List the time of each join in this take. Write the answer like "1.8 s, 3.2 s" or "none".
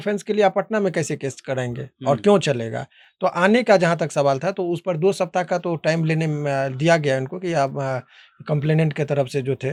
none

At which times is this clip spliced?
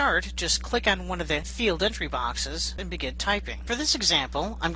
3.5 s

